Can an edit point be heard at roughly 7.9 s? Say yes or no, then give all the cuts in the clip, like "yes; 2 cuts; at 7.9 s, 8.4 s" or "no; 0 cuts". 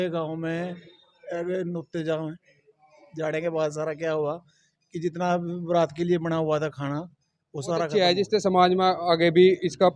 yes; 1 cut; at 7.9 s